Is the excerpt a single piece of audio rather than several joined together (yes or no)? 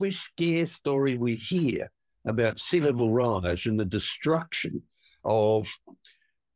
yes